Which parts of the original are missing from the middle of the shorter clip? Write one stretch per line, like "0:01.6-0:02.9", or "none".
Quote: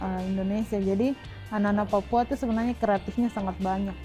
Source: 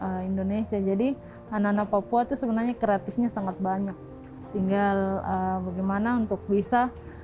none